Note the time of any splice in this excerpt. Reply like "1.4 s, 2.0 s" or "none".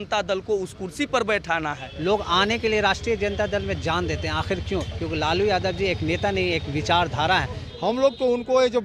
1.9 s, 7.7 s